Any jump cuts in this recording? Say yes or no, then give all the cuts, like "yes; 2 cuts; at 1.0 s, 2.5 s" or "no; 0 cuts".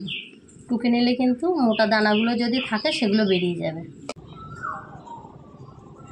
yes; 1 cut; at 4.2 s